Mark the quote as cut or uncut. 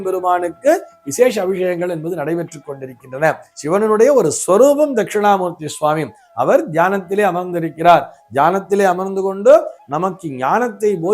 cut